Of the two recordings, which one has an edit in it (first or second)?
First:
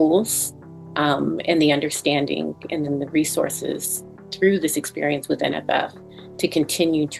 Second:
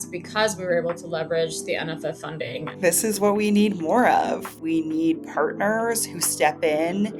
second